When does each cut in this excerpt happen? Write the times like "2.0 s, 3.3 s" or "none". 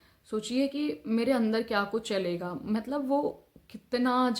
none